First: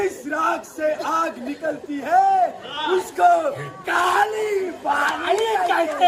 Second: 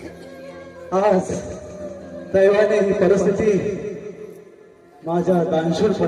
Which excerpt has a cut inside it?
second; 1 cut; at 2.1 s

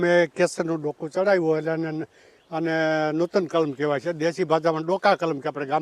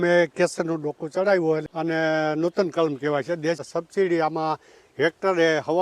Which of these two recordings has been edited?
second; 2 cuts; at 1.6 s, 3.6 s

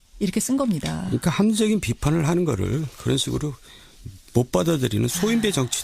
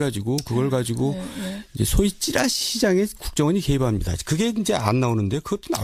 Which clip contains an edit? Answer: first; 1 cut; at 2.5 s

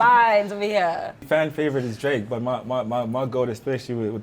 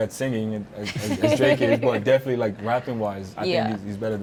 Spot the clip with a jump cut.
first; 1 cut; at 1.2 s

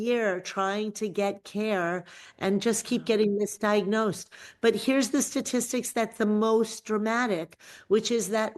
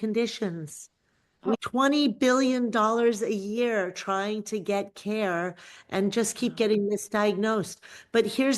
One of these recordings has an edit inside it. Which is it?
second; 1 cut; at 1.6 s

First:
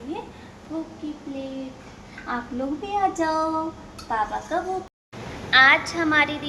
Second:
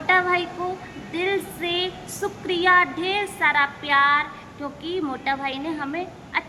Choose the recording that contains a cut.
first; 1 cut; at 4.9 s

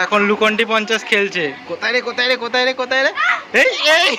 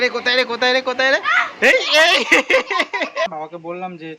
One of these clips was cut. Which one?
second; 1 cut; at 3.3 s

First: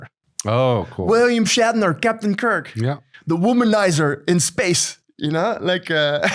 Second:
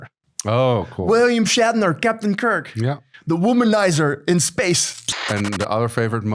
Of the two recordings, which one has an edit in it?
second; 1 cut; at 5.1 s

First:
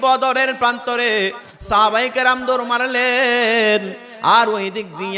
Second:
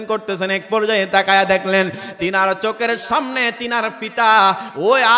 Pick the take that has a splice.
first; 1 cut; at 1.5 s

